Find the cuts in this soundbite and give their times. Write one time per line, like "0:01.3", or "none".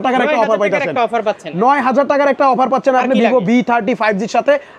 none